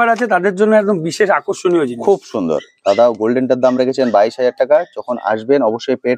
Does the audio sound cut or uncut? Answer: uncut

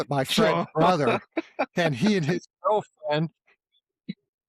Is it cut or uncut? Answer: uncut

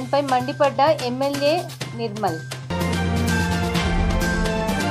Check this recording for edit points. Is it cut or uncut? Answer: uncut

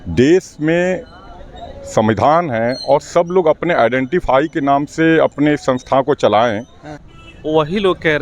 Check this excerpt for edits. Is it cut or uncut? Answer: cut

